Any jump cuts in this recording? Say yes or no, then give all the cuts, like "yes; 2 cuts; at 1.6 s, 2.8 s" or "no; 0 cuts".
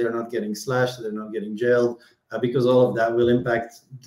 no; 0 cuts